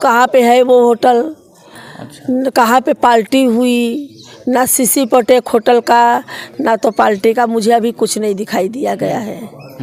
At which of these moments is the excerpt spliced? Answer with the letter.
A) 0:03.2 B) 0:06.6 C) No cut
C